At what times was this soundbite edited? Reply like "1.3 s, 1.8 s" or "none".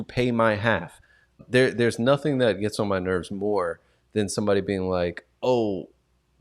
1.3 s